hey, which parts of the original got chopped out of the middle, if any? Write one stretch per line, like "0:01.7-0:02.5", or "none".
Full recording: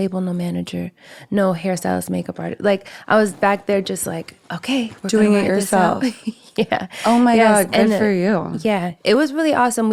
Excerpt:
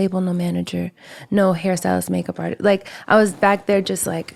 none